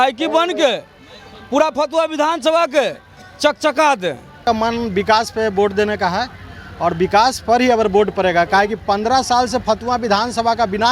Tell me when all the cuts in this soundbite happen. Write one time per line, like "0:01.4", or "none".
0:04.4